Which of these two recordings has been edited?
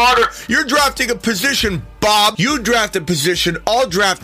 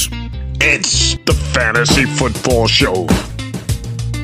first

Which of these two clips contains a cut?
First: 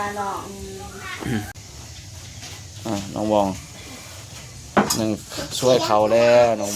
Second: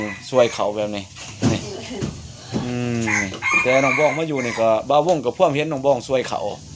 first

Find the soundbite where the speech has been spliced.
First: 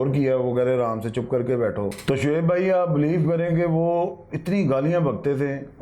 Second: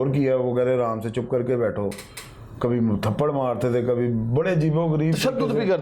first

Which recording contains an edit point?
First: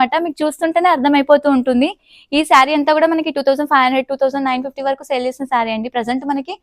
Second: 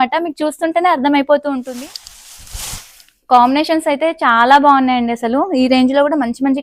second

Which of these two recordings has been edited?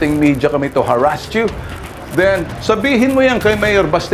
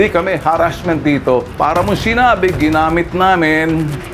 second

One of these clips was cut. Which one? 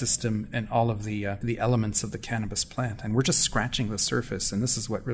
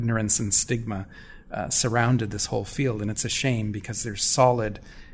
first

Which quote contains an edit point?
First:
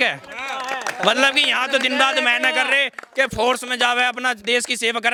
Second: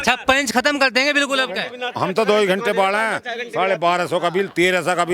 second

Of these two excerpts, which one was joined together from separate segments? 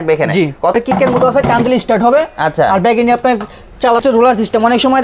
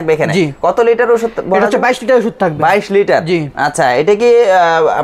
first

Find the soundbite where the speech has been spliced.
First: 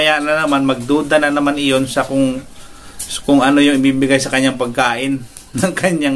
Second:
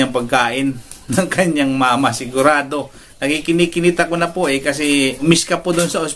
second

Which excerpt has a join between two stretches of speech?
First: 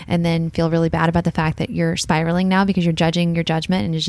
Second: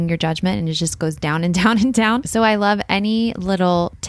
second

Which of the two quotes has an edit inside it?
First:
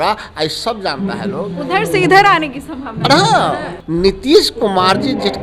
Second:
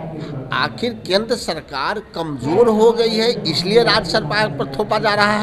first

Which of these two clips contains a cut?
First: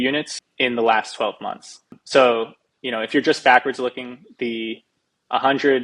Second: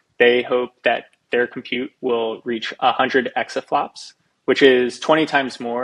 first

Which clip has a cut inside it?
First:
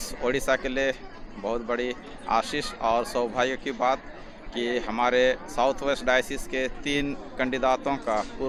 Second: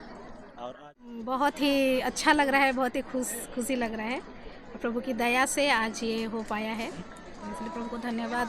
second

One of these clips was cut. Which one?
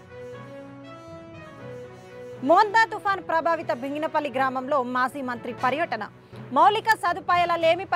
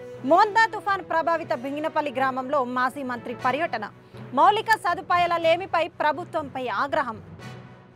first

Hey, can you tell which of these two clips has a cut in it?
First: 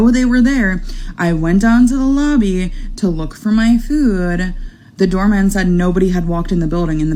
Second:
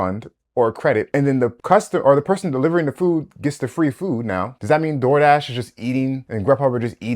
second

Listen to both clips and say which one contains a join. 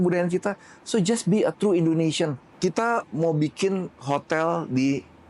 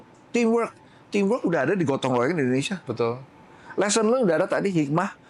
first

